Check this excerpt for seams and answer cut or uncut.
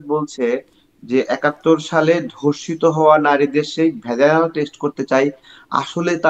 uncut